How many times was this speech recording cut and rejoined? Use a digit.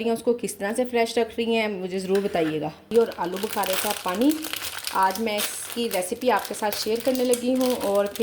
1